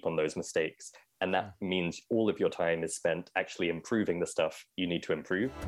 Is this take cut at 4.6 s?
yes; 1 cut; at 4.6 s

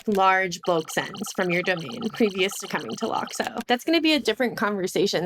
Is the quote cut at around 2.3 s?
no; 1 cut; at 3.6 s

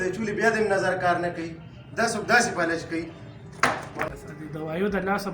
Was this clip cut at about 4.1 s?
yes; 1 cut; at 4.1 s

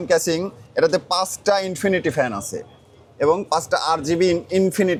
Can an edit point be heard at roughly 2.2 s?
no; 0 cuts

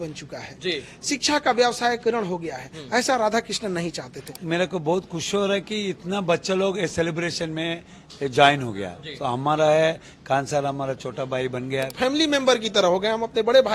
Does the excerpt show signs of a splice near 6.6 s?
no; 2 cuts; at 4.4 s, 11.9 s

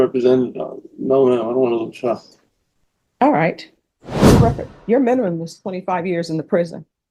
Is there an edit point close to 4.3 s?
yes; 1 cut; at 4.3 s

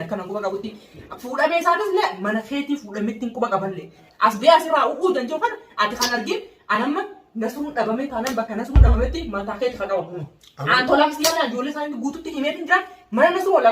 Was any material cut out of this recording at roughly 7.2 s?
no; 1 cut; at 4.0 s

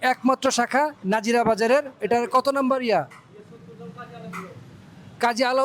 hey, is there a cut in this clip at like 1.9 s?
no; 0 cuts

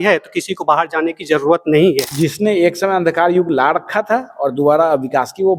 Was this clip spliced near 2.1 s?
yes; 1 cut; at 2.1 s

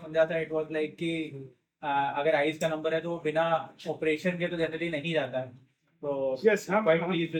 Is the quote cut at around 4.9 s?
no; 0 cuts

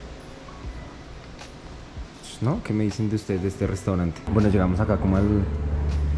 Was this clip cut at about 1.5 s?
no; 1 cut; at 4.2 s

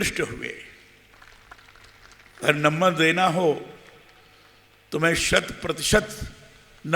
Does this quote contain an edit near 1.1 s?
yes; 1 cut; at 1.1 s

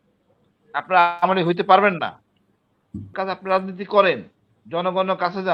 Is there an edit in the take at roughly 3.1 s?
yes; 1 cut; at 3.1 s

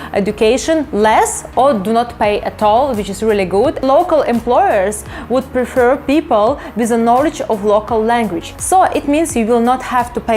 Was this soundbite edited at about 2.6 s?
no; 2 cuts; at 3.8 s, 8.5 s

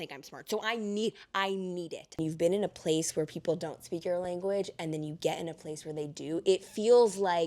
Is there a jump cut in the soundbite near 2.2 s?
yes; 1 cut; at 2.2 s

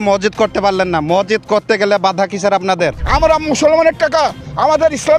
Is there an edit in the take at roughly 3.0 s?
yes; 1 cut; at 3.0 s

